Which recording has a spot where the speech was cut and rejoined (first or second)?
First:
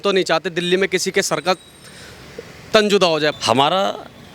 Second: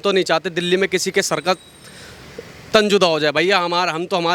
first